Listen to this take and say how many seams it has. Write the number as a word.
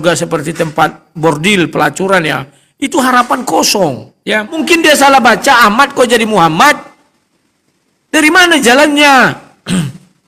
one